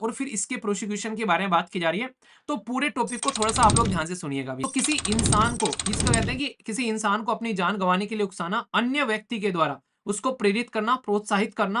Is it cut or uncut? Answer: cut